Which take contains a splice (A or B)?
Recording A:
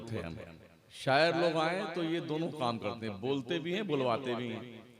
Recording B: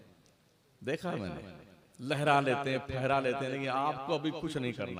A